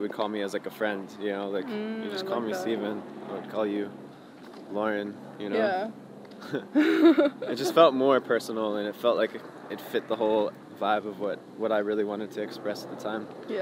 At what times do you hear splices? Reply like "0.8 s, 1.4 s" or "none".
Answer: none